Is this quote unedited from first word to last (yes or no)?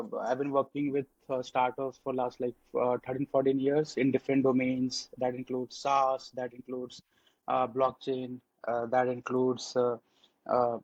yes